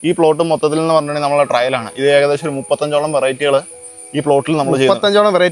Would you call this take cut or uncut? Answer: uncut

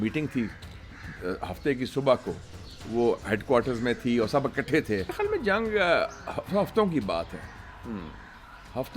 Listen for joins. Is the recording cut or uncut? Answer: cut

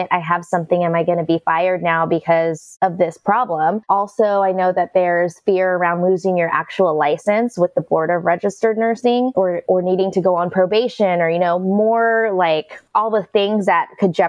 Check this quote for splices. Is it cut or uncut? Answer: cut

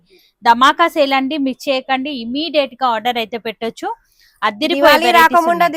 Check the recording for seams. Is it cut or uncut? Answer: uncut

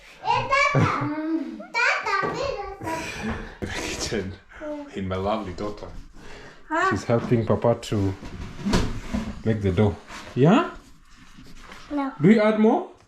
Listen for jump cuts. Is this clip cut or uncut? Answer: cut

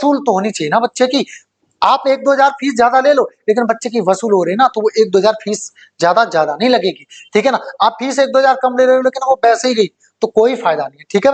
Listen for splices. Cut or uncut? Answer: uncut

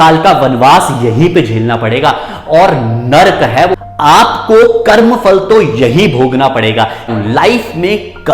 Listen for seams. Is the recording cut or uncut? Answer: cut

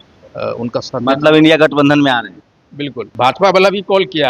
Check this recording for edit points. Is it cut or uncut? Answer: cut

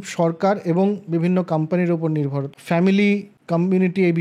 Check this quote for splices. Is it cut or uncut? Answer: cut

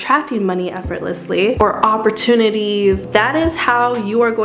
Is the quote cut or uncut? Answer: cut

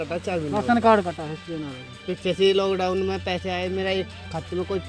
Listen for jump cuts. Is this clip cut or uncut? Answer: uncut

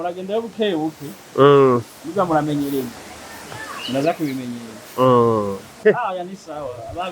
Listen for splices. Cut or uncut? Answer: cut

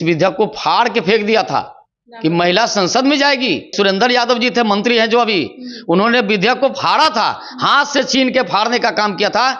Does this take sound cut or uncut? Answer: cut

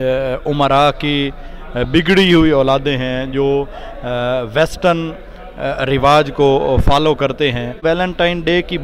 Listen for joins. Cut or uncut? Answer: cut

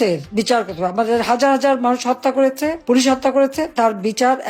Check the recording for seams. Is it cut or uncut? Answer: uncut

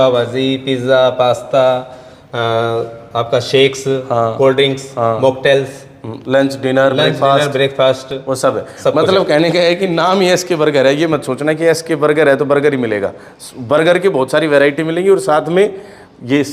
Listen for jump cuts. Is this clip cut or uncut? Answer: uncut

